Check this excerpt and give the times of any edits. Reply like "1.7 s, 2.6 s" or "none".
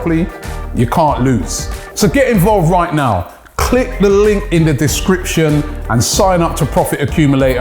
1.6 s